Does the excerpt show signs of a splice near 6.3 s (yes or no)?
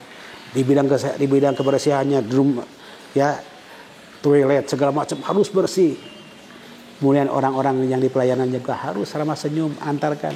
no